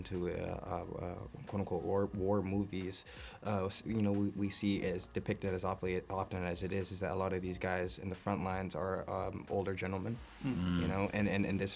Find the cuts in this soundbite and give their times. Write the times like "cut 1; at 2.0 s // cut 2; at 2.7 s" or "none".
none